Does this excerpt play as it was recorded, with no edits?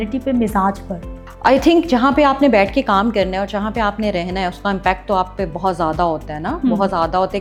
yes; 0 cuts

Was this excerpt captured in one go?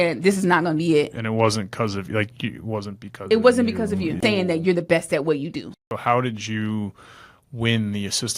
no; 2 cuts; at 4.2 s, 5.7 s

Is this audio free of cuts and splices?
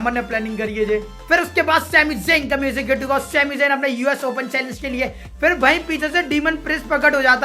no; 2 cuts; at 1.1 s, 5.3 s

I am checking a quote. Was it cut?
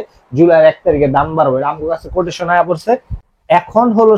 no; 0 cuts

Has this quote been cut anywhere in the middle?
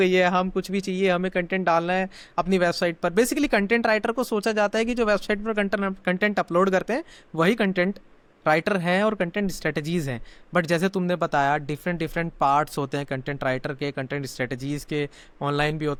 no; 0 cuts

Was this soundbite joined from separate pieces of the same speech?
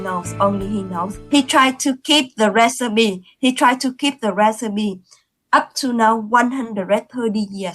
yes; 1 cut; at 1.1 s

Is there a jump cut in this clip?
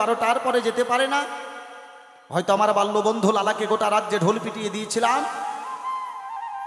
no; 0 cuts

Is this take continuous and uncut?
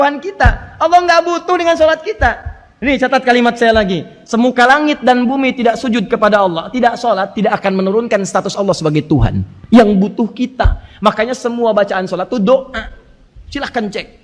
yes; 0 cuts

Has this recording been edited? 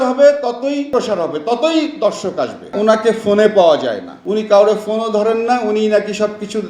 yes; 1 cut; at 2.7 s

